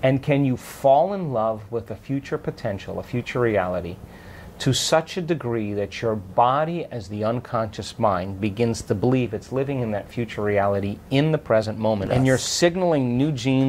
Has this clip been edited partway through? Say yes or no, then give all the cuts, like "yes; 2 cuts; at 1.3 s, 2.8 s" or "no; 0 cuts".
yes; 1 cut; at 12.0 s